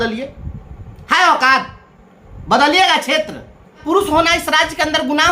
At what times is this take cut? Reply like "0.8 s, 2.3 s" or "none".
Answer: 3.8 s